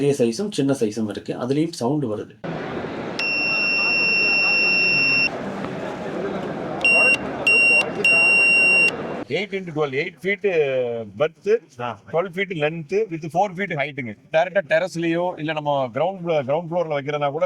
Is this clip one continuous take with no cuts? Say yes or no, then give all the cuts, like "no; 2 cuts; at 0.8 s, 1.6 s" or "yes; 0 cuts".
no; 2 cuts; at 9.2 s, 14.2 s